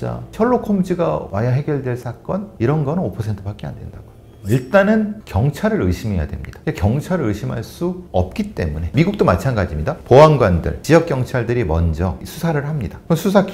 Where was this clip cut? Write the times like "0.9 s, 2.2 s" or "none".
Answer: none